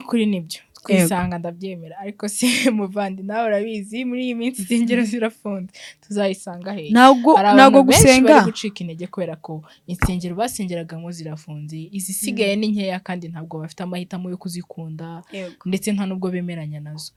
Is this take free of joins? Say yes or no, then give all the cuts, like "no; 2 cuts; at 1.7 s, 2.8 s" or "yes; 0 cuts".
yes; 0 cuts